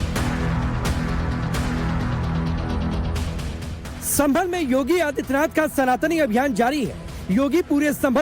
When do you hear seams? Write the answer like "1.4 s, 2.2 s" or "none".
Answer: 5.7 s